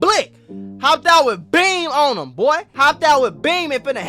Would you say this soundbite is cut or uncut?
cut